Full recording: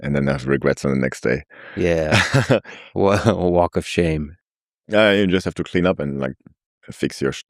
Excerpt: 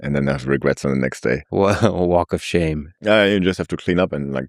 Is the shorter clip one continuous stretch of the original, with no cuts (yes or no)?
no